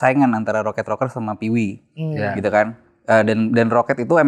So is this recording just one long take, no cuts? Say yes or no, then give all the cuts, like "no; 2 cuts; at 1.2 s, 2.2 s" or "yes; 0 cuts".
yes; 0 cuts